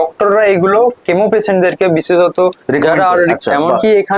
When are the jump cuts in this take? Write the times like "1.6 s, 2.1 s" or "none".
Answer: none